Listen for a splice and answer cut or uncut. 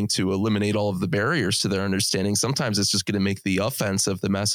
uncut